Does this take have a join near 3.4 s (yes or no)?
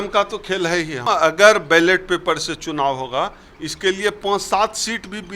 no